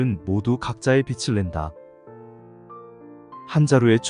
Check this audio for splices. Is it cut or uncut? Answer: uncut